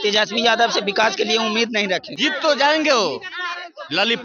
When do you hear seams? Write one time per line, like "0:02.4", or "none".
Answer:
0:02.1